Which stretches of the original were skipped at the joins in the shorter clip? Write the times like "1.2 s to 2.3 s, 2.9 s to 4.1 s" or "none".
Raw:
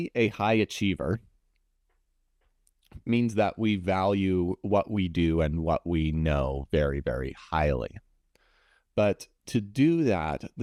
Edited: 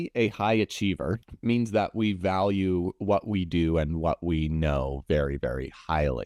1.3 s to 2.9 s